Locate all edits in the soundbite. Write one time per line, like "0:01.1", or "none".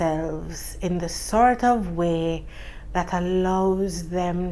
none